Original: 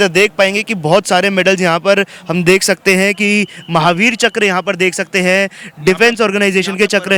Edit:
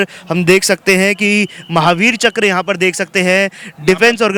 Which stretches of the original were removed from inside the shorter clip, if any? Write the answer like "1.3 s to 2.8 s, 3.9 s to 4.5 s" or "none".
none